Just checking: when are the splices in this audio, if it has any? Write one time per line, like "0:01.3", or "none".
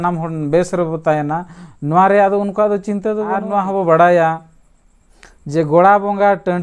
0:03.4